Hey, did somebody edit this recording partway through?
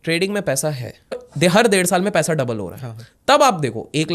yes; 1 cut; at 1.3 s

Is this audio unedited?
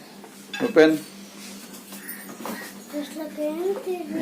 no; 1 cut; at 2.6 s

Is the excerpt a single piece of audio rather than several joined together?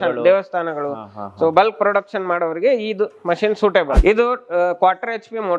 no; 1 cut; at 4.0 s

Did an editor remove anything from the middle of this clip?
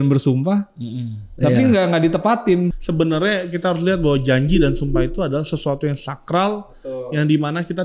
yes; 1 cut; at 2.7 s

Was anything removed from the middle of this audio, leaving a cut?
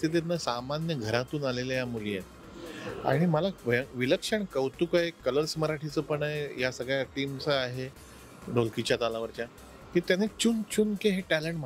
no; 0 cuts

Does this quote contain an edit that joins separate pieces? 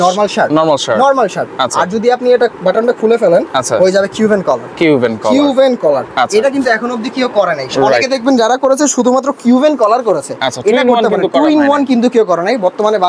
no; 0 cuts

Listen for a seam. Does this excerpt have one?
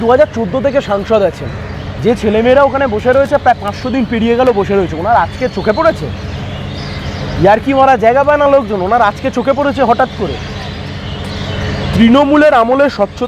no; 0 cuts

